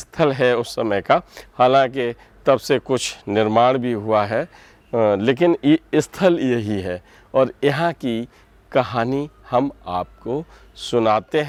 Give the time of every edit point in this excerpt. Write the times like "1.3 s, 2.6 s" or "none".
none